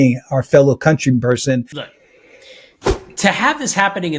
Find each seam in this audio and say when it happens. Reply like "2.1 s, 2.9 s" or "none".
1.7 s

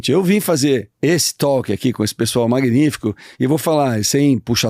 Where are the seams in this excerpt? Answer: 0.9 s

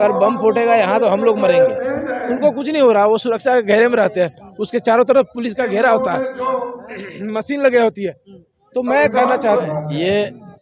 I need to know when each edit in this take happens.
9.4 s

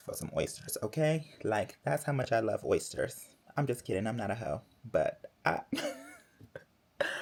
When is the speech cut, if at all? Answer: none

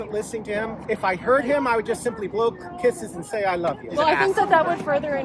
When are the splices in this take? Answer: none

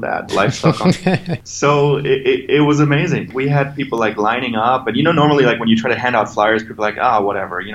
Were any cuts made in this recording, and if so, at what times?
1.4 s, 3.3 s

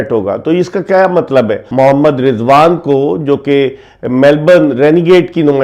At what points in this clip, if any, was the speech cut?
1.7 s

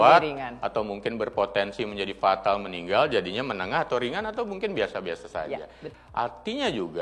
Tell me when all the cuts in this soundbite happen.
5.8 s

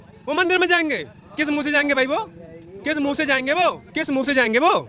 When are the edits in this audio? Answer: 3.9 s

